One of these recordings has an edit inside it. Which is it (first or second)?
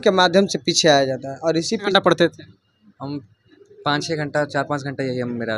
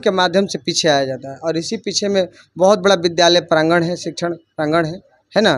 first